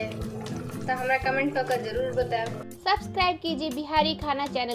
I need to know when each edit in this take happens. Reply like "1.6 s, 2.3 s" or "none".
2.6 s